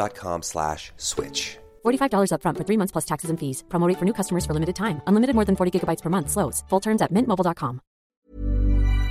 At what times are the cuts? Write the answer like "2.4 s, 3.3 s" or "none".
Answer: 8.0 s